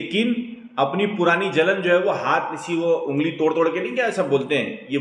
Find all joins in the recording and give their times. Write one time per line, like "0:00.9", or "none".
none